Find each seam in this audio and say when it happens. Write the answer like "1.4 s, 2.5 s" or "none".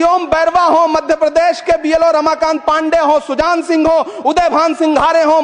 none